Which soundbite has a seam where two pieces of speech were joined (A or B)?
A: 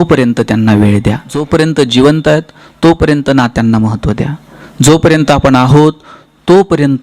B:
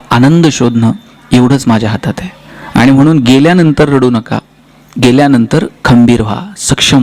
A